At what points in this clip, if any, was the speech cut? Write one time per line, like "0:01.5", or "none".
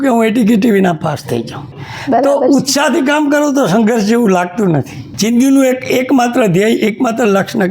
0:01.7
0:05.0